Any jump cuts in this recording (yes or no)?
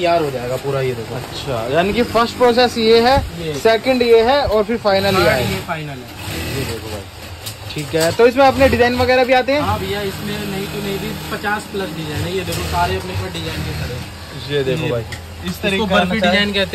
no